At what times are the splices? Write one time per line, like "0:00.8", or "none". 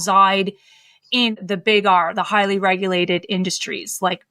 0:01.3